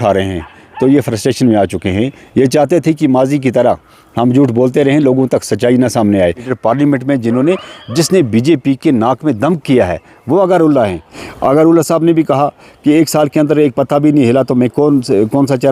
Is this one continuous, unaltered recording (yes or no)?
no